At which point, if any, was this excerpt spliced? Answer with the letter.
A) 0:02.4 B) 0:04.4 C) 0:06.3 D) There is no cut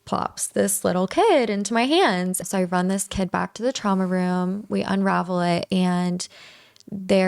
A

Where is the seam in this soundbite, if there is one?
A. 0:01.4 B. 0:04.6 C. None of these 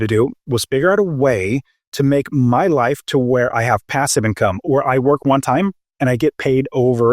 B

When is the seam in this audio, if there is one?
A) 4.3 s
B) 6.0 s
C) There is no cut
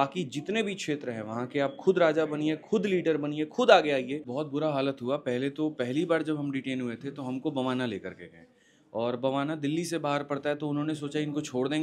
A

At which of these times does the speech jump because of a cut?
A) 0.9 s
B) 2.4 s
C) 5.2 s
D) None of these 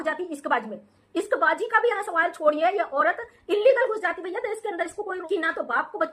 C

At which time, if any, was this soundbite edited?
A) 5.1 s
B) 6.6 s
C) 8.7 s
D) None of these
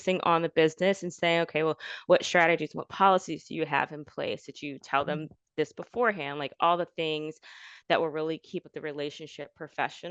C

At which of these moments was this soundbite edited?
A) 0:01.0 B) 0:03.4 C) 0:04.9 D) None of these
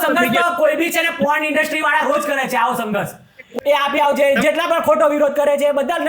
B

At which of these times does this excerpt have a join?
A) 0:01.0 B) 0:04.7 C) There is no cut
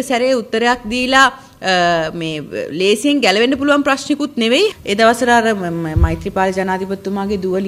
B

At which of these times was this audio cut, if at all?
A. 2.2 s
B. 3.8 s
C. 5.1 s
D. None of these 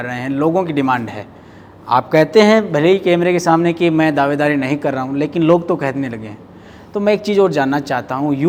D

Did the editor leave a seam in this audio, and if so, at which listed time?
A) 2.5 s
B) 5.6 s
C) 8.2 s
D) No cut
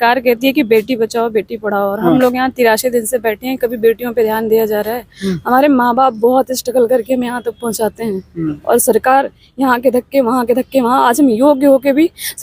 D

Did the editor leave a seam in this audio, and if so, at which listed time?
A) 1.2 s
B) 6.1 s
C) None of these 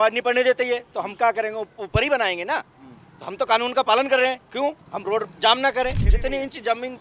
B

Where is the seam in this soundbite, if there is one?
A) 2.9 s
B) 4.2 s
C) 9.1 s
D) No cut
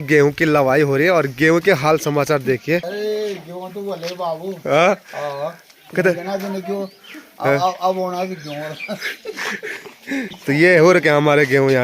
A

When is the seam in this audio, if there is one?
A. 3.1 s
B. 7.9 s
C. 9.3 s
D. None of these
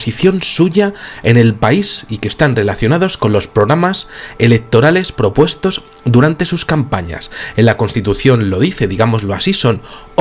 A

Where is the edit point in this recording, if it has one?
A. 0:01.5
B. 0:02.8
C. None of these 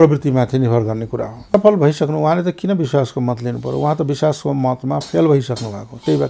A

